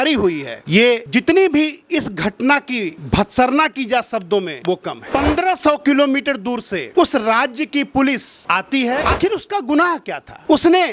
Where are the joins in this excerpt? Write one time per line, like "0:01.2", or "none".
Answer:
0:05.0
0:09.0